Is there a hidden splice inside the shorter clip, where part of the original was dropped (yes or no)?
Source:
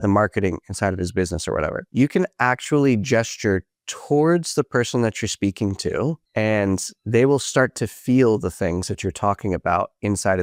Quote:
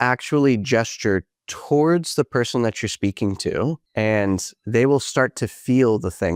no